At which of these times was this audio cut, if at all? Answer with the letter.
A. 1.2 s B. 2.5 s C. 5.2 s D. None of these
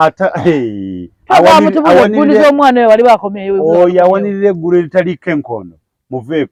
D